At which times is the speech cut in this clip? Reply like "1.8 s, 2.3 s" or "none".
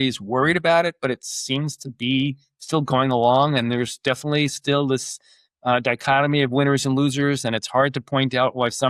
none